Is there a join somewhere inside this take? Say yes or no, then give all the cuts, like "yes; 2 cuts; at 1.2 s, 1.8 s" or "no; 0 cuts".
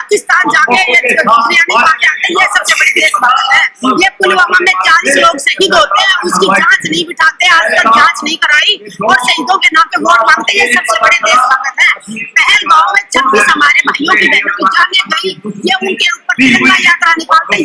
no; 0 cuts